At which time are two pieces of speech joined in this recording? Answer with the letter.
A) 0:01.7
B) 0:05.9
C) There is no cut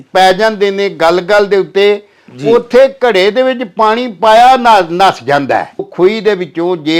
B